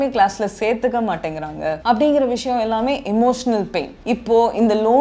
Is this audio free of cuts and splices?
no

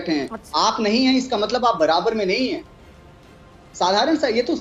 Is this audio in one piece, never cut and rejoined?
yes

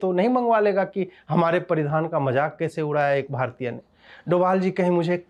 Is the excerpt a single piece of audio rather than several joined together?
yes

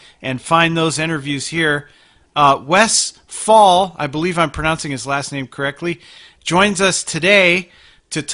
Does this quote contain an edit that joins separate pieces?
no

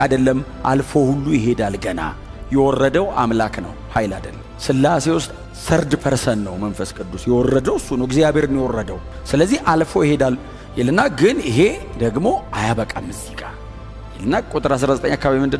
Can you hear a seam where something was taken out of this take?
no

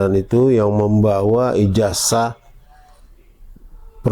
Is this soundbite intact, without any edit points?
yes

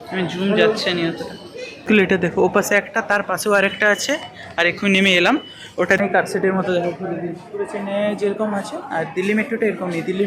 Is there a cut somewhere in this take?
yes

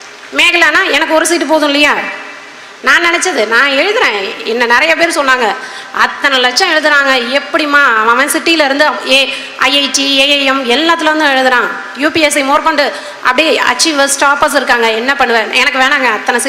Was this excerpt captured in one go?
yes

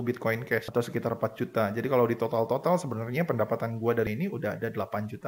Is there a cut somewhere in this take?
yes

